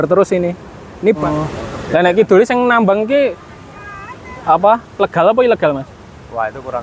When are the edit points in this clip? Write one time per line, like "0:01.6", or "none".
0:01.2